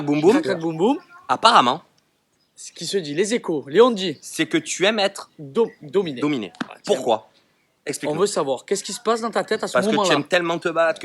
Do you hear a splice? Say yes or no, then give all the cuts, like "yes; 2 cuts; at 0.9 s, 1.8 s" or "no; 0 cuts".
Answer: no; 0 cuts